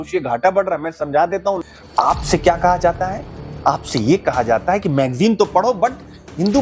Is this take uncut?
no; 1 cut; at 1.5 s

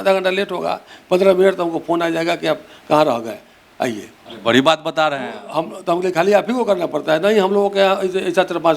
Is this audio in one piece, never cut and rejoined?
yes; 0 cuts

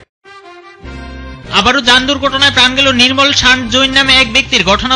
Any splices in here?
no; 0 cuts

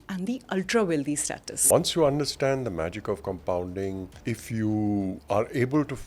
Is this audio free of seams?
no; 3 cuts; at 1.5 s, 4.1 s, 5.2 s

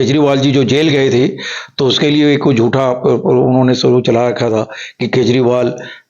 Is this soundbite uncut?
yes; 0 cuts

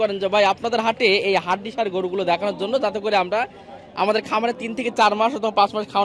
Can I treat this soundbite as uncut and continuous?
yes; 0 cuts

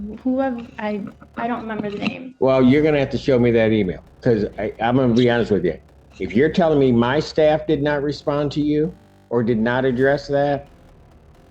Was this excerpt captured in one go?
yes; 0 cuts

